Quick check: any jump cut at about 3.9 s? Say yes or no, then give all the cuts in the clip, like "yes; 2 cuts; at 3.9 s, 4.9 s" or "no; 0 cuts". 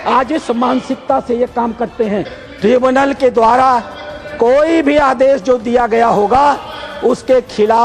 no; 1 cut; at 2.4 s